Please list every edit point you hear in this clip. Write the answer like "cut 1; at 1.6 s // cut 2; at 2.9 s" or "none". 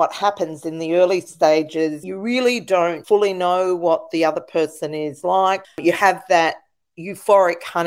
cut 1; at 2.1 s // cut 2; at 3.0 s // cut 3; at 5.6 s